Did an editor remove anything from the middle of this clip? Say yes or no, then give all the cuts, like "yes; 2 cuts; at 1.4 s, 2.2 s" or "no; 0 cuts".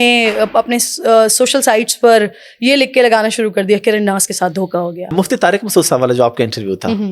yes; 1 cut; at 5.1 s